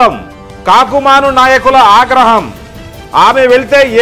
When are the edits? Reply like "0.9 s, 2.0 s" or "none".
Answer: none

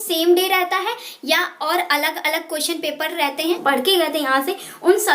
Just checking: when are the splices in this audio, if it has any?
3.3 s

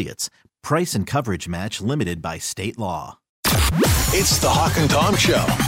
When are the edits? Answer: 3.3 s

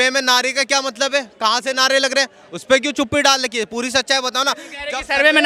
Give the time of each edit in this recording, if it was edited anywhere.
none

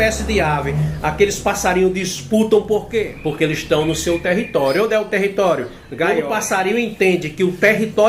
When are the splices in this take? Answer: 3.0 s, 6.2 s

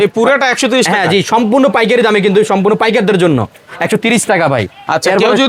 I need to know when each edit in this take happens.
none

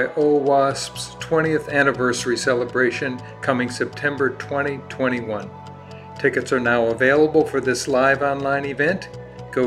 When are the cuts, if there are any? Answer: none

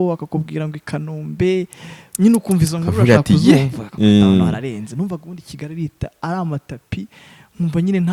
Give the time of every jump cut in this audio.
none

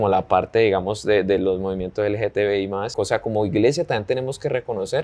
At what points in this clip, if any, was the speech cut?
2.9 s

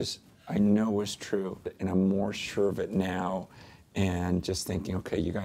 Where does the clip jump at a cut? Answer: 1.7 s

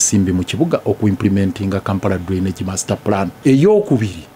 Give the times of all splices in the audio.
3.3 s

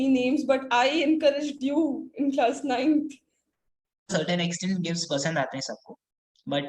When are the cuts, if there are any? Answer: 4.1 s

